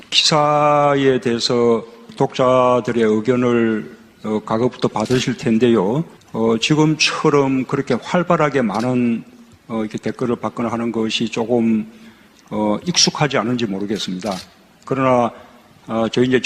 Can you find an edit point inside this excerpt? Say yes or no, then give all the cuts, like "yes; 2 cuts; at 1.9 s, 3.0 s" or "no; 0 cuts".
no; 0 cuts